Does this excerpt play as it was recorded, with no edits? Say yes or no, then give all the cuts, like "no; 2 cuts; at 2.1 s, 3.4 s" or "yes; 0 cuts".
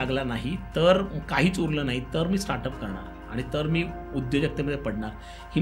yes; 0 cuts